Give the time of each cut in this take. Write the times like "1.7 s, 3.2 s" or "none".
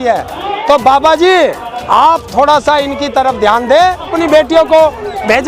4.1 s